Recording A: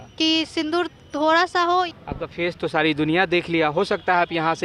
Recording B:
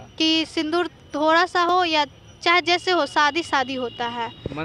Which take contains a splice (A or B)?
A